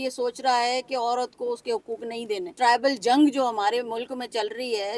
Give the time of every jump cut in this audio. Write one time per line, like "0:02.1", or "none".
0:02.5